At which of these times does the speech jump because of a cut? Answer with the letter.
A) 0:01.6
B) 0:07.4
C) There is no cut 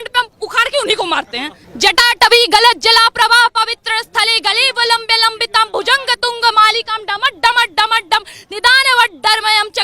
A